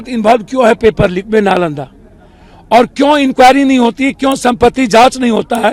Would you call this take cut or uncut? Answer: uncut